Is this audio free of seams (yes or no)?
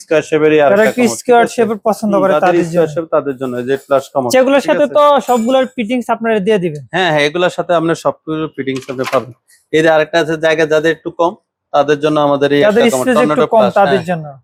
yes